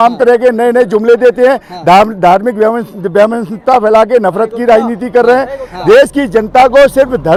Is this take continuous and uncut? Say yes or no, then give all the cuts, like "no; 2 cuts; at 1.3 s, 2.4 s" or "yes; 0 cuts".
yes; 0 cuts